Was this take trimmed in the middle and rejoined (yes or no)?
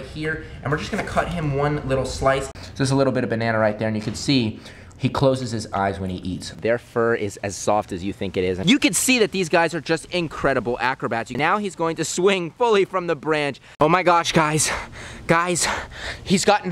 yes